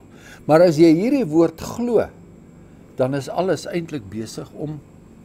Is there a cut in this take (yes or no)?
no